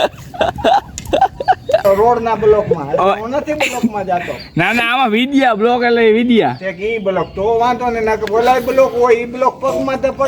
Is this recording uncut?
no; 1 cut; at 1.8 s

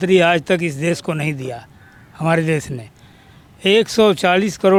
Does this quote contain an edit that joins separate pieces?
no; 0 cuts

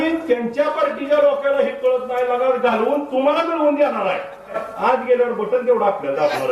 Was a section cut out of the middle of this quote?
yes; 1 cut; at 4.6 s

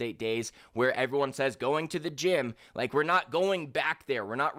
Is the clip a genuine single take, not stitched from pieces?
yes; 0 cuts

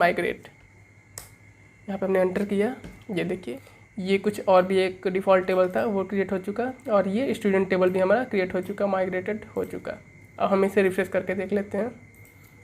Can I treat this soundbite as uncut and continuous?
no; 1 cut; at 3.5 s

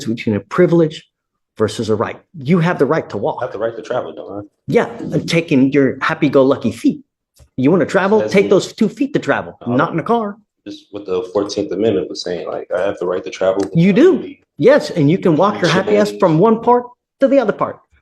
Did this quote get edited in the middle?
no; 0 cuts

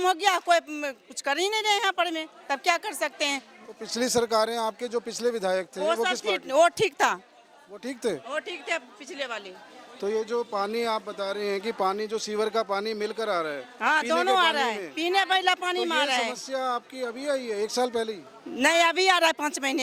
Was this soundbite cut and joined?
no; 0 cuts

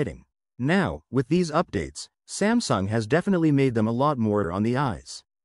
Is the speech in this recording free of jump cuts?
no; 1 cut; at 4.5 s

